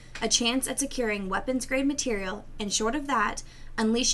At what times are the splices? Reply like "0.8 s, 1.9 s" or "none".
2.2 s